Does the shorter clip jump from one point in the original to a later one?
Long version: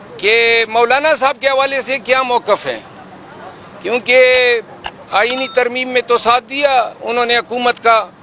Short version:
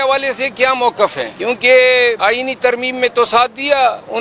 yes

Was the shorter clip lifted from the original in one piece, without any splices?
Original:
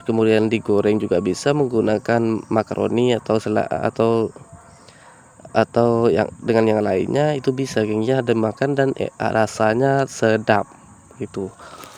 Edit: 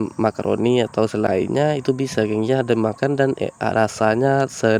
no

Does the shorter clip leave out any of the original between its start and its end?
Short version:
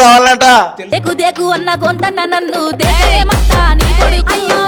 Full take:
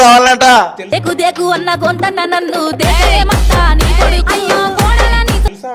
no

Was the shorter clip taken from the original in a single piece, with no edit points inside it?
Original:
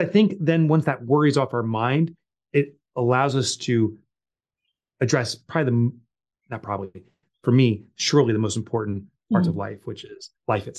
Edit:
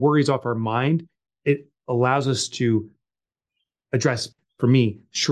no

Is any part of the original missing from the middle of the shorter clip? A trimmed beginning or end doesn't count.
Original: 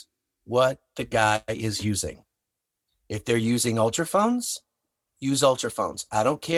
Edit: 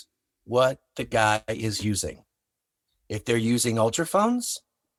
no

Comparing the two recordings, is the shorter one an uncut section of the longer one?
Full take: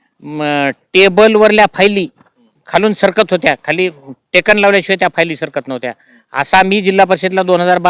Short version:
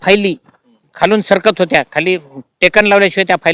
yes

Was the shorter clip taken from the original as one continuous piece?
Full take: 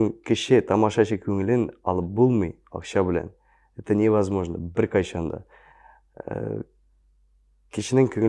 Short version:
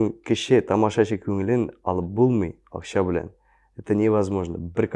yes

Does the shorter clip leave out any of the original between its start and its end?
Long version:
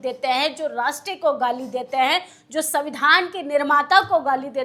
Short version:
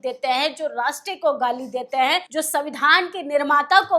yes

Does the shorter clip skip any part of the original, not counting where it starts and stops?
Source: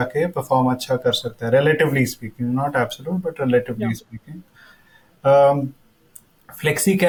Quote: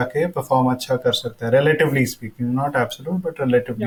no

